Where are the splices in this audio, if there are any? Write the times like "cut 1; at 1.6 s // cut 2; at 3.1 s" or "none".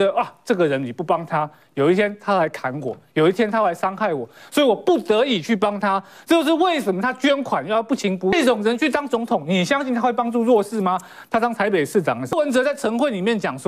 cut 1; at 8.3 s // cut 2; at 12.3 s

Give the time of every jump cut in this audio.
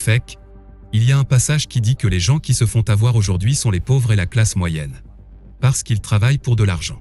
none

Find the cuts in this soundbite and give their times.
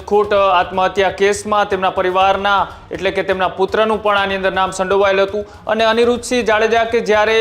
cut 1; at 5.6 s

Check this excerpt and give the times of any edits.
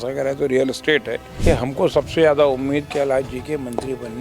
cut 1; at 1.3 s

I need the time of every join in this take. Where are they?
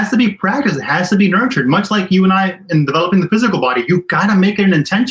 none

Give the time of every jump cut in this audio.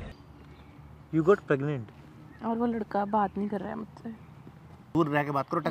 cut 1; at 4.8 s

